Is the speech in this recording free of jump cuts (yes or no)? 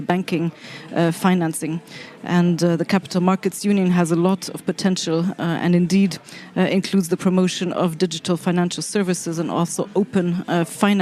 yes